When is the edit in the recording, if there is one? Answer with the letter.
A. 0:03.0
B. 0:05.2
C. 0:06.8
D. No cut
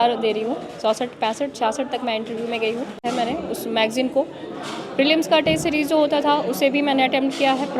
A